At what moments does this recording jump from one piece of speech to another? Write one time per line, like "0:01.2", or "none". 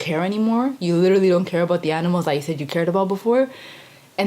none